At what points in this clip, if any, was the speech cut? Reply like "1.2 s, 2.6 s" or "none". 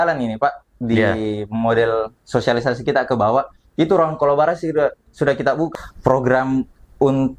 5.7 s